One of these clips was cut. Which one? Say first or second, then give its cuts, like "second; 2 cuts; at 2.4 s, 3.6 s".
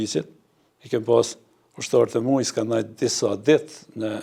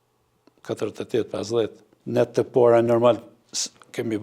second; 1 cut; at 1.9 s